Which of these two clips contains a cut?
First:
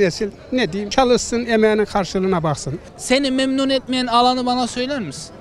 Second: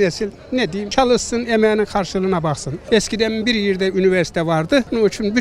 first; 1 cut; at 2.7 s

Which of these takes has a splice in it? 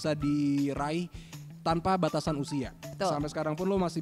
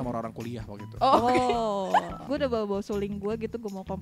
second; 1 cut; at 2.2 s

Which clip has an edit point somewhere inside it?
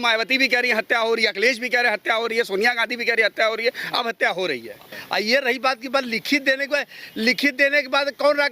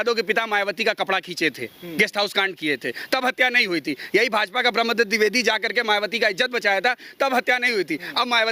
first; 1 cut; at 4.8 s

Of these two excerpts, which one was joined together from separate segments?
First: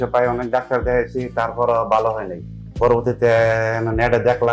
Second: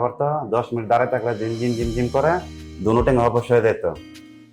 first; 1 cut; at 2.7 s

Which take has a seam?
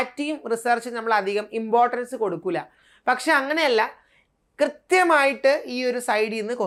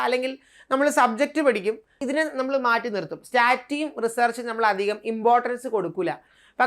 second; 1 cut; at 1.9 s

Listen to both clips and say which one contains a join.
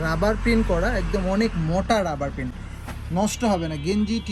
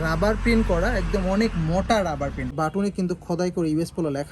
second; 1 cut; at 2.5 s

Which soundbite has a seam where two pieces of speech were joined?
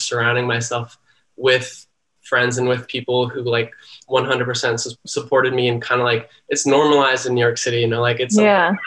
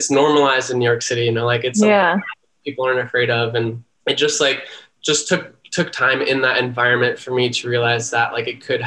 second; 1 cut; at 3.9 s

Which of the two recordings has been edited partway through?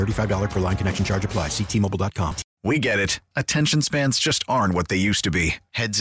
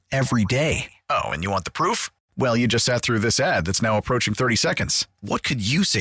first; 1 cut; at 2.4 s

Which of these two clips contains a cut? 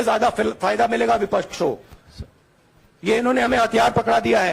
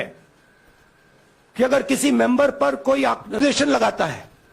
second; 1 cut; at 3.4 s

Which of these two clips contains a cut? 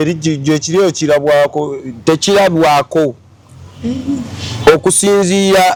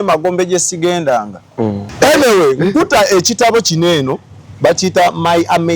second; 1 cut; at 1.8 s

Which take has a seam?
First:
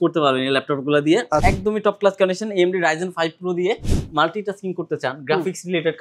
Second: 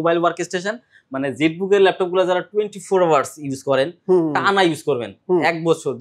first; 2 cuts; at 1.4 s, 3.9 s

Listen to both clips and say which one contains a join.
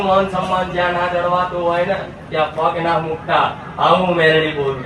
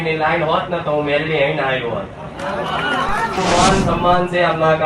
second; 1 cut; at 3.4 s

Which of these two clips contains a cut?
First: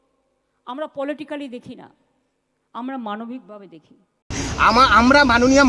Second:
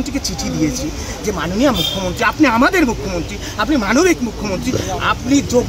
first; 1 cut; at 4.4 s

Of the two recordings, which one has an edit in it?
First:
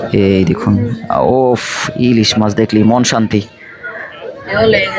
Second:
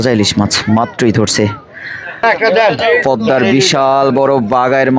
second; 1 cut; at 2.2 s

